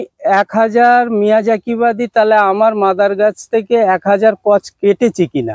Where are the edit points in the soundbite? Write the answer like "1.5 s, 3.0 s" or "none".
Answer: none